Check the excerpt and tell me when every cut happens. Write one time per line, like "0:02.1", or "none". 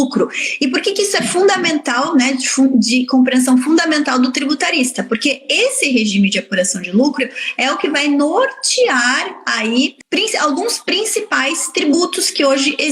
0:10.0